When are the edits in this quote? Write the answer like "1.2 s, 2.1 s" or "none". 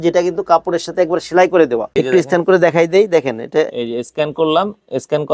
1.9 s

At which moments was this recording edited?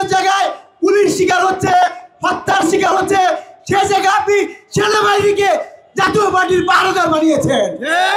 none

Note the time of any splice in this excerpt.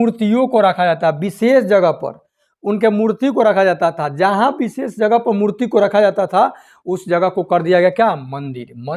none

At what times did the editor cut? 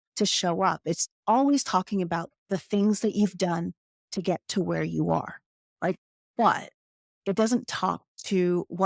6.0 s

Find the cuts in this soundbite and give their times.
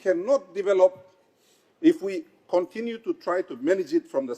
none

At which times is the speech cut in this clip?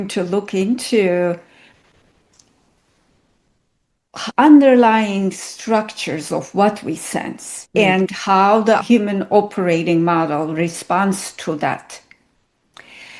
none

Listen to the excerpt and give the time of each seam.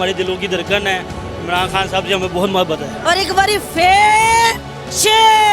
2.9 s

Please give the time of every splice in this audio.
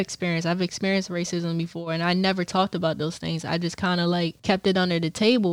4.4 s

